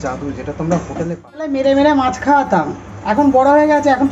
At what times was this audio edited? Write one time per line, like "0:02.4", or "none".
0:01.2

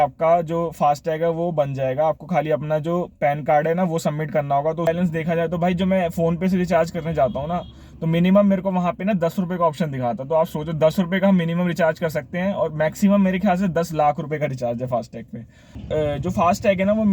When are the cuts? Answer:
0:04.9
0:15.8

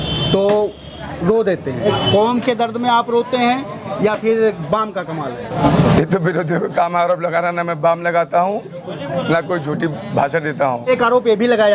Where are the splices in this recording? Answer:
0:01.9
0:05.6
0:10.8

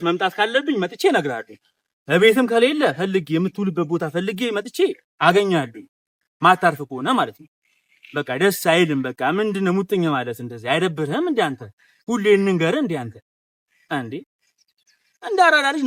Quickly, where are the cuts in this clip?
none

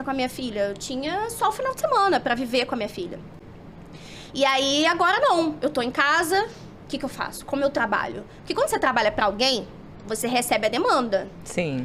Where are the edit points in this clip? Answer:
none

